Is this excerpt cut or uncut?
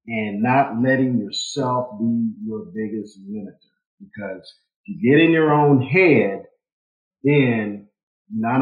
uncut